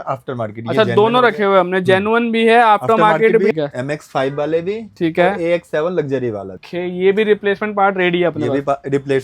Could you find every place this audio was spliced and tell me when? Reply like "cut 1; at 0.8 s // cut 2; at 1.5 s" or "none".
cut 1; at 3.5 s // cut 2; at 6.6 s